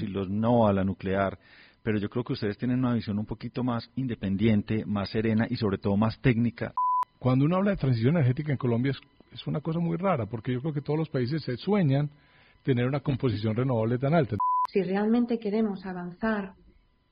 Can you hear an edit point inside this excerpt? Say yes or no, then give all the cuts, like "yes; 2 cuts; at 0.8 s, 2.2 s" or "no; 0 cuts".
yes; 2 cuts; at 6.7 s, 14.4 s